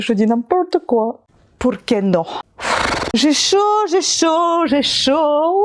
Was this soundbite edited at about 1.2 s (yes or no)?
yes